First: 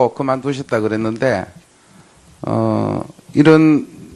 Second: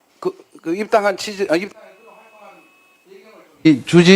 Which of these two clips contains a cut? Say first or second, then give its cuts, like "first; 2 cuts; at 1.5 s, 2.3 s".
second; 1 cut; at 2.9 s